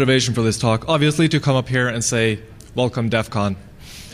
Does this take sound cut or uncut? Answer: uncut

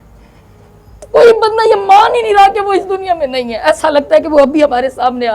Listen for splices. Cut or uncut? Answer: cut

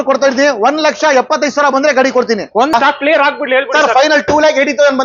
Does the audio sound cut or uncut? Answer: cut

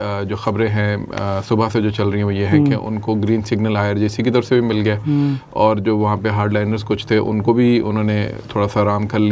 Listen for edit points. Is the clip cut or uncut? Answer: uncut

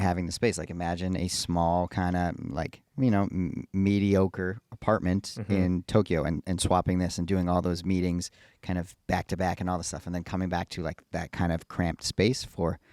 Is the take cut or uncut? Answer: uncut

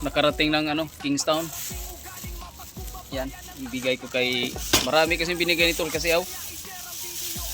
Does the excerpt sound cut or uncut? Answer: uncut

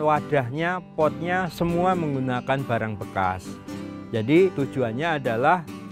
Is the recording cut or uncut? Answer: cut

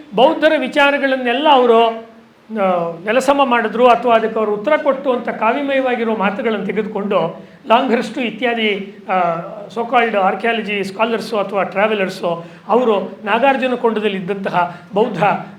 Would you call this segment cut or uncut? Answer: uncut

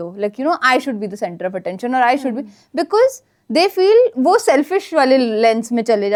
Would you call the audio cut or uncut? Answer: uncut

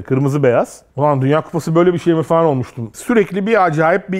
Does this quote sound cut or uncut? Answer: cut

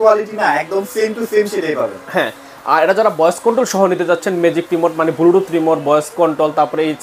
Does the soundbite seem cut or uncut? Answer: uncut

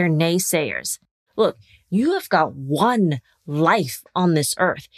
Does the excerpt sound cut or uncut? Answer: cut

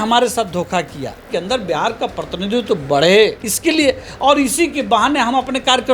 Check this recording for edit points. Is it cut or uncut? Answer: cut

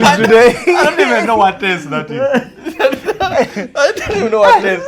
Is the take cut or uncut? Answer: uncut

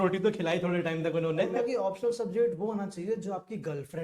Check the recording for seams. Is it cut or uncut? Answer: cut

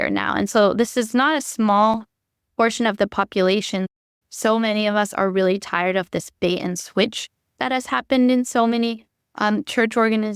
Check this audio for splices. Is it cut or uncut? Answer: cut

